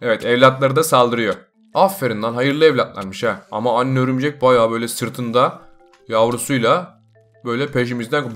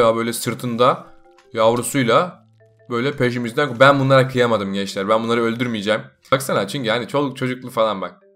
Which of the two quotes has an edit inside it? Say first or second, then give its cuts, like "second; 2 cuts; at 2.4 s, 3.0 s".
second; 1 cut; at 6.3 s